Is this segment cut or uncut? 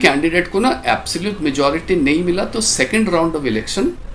uncut